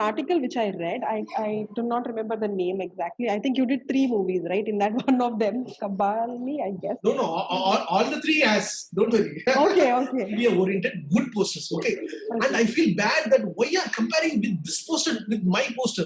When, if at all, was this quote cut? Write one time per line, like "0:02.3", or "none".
0:10.4